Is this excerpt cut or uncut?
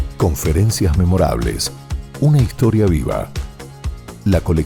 uncut